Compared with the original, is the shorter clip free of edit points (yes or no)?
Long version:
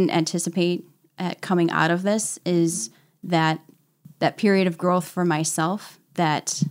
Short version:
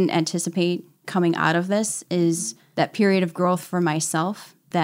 no